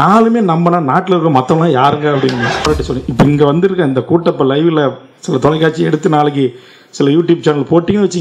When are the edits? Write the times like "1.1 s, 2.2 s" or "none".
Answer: 2.7 s